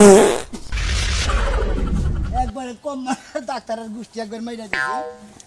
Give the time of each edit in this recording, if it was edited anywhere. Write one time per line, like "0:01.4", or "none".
none

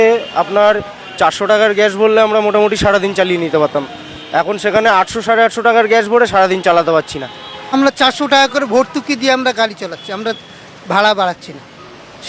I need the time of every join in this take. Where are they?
0:07.7

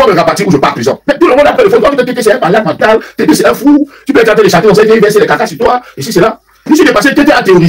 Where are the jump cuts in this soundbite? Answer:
0:01.0

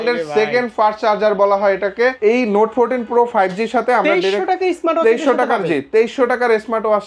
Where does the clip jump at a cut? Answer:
0:02.2

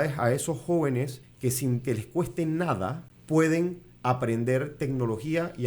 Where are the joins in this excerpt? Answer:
0:01.2
0:03.1

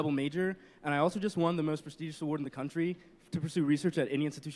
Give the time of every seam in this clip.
0:03.1

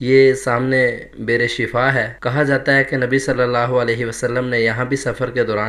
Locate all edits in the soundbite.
none

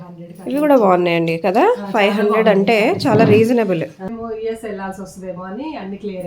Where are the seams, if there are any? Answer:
0:04.1

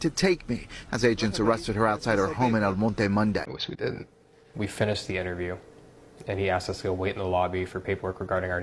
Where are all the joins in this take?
0:03.6

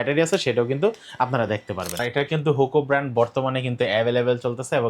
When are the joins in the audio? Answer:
0:02.0

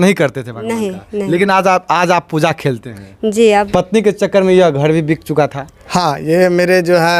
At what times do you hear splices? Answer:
0:03.5

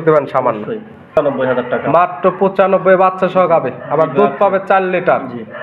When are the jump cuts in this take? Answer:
0:01.0

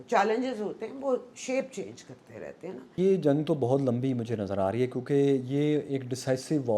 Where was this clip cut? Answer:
0:03.0

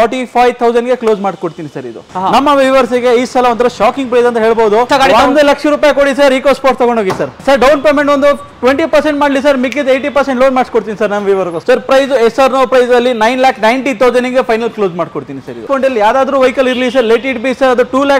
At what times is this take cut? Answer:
0:02.1
0:04.9
0:07.4
0:11.6
0:15.6

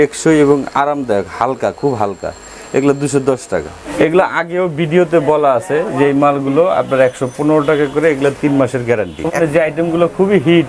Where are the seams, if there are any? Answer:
0:03.8
0:09.4

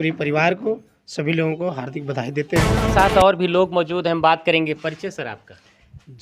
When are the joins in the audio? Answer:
0:02.9

